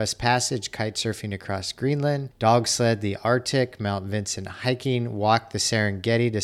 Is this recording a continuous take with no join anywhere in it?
no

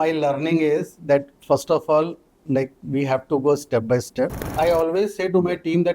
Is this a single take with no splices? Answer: no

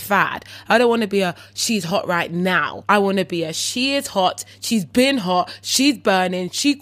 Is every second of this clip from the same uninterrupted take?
no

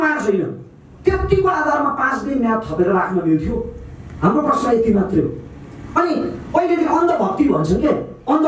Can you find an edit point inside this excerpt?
no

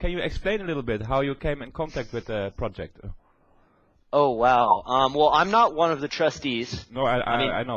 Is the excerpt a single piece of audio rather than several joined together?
no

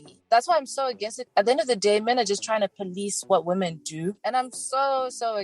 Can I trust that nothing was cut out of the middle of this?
no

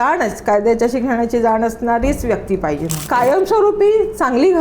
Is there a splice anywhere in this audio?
yes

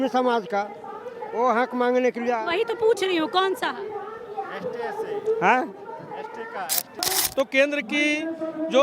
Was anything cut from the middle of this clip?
yes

